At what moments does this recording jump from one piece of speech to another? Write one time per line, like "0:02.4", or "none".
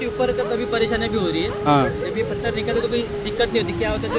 none